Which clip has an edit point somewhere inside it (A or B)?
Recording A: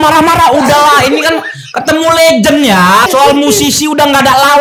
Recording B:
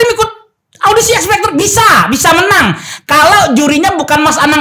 A